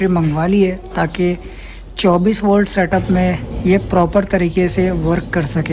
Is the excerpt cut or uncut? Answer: uncut